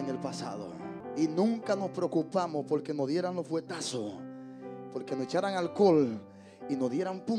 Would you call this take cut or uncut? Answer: cut